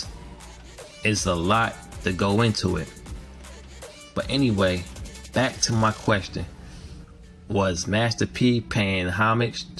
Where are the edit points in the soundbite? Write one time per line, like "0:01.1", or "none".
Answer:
none

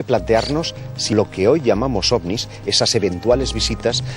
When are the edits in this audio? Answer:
0:01.1

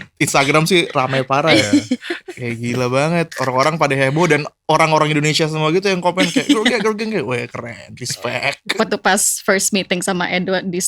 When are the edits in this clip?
0:08.6

